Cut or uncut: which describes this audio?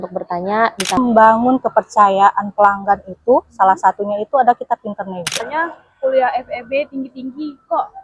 cut